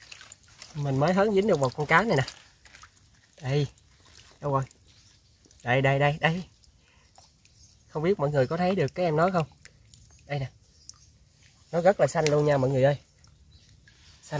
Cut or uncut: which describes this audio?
uncut